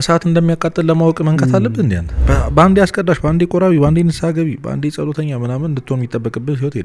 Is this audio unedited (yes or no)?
no